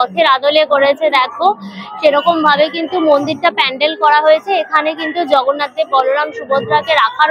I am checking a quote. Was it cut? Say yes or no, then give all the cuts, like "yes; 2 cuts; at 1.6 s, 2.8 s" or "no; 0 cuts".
no; 0 cuts